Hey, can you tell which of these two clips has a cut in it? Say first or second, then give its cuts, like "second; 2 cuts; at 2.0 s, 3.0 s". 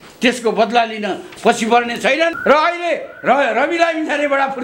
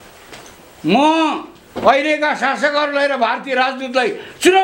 first; 1 cut; at 2.4 s